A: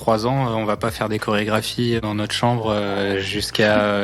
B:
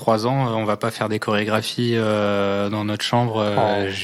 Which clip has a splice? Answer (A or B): A